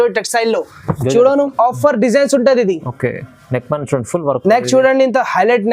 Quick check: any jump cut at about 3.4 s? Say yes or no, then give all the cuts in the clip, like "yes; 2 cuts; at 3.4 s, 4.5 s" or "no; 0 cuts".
no; 1 cut; at 1.5 s